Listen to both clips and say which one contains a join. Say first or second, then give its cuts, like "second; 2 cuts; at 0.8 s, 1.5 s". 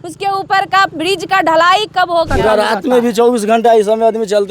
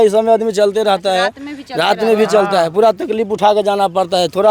first; 1 cut; at 2.3 s